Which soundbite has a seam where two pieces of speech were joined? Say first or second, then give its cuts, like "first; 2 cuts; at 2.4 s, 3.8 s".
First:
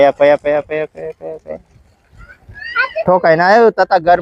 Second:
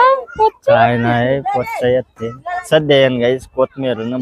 second; 1 cut; at 2.6 s